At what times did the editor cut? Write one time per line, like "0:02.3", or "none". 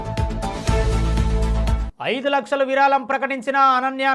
0:01.9